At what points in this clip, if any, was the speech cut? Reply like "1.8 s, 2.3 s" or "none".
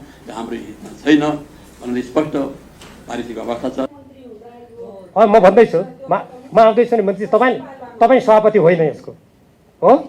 3.9 s